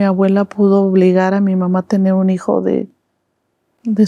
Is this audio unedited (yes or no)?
yes